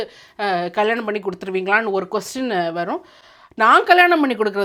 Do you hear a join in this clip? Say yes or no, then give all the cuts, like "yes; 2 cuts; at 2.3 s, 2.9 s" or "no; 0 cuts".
no; 0 cuts